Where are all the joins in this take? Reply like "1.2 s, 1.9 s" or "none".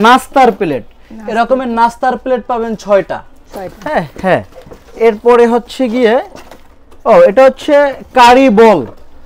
none